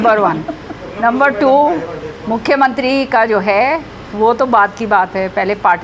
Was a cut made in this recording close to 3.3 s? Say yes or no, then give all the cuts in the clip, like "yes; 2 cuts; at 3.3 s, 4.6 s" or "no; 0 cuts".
no; 0 cuts